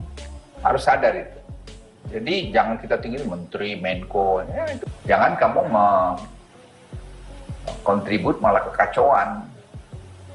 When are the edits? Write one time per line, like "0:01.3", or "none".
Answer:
0:04.8